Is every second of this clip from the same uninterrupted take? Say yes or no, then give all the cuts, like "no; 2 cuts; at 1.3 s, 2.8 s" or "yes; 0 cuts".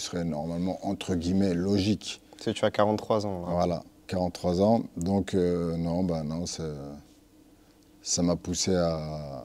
yes; 0 cuts